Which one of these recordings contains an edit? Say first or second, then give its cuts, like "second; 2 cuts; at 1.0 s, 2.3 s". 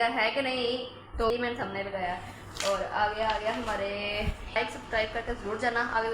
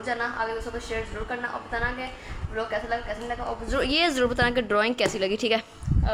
first; 2 cuts; at 1.3 s, 4.6 s